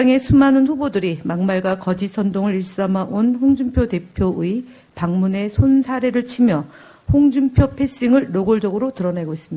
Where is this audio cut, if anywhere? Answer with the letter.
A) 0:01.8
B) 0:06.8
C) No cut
A